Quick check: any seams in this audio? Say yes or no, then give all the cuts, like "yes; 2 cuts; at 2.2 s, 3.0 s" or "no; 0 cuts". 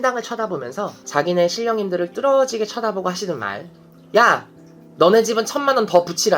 no; 0 cuts